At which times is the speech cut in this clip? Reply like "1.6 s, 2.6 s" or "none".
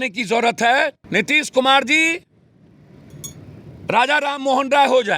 1.0 s

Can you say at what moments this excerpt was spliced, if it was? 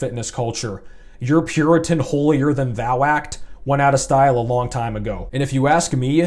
5.2 s

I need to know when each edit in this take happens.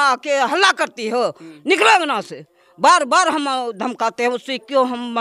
none

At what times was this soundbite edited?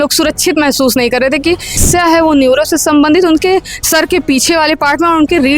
1.8 s

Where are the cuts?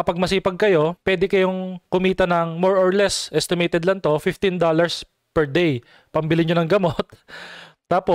1.0 s

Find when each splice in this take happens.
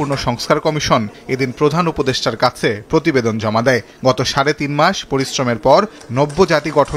none

